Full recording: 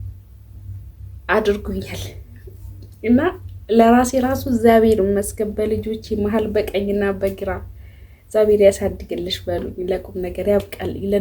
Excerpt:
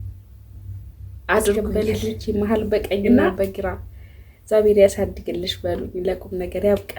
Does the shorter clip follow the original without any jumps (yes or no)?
no